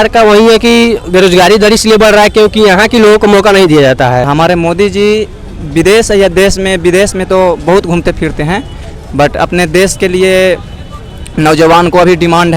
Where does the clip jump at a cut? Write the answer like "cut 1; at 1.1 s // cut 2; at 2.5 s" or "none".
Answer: cut 1; at 4.3 s